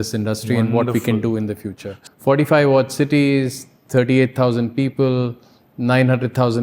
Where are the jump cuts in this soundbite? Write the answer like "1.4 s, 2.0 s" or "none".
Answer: 2.0 s